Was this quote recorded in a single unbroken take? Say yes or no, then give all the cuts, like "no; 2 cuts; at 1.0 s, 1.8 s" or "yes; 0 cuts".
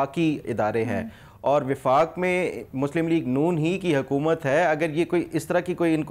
yes; 0 cuts